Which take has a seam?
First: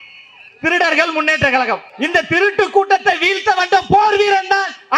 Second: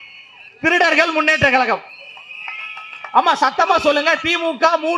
first; 1 cut; at 1.9 s

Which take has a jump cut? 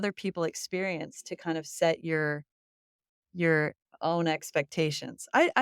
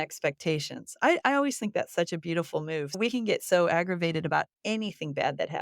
second; 1 cut; at 3.0 s

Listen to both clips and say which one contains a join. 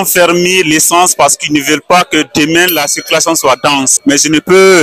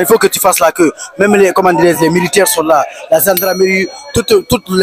first; 1 cut; at 3.9 s

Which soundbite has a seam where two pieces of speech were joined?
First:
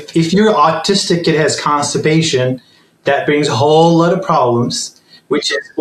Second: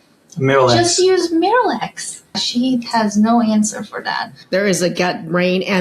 second; 2 cuts; at 2.4 s, 4.4 s

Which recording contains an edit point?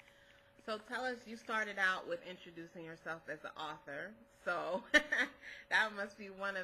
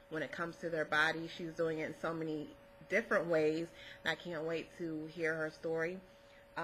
second; 1 cut; at 1.4 s

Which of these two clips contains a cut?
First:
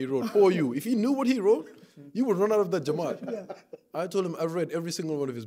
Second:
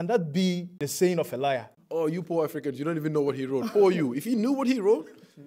second; 2 cuts; at 0.8 s, 1.8 s

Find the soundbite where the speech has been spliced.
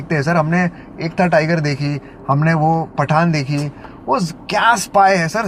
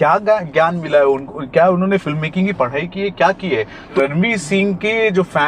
second; 1 cut; at 3.9 s

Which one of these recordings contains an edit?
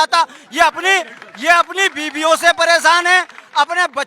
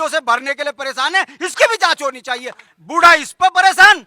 second; 1 cut; at 2.6 s

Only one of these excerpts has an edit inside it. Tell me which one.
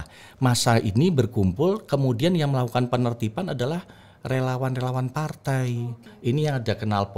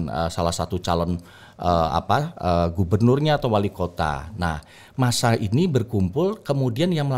first; 1 cut; at 6.0 s

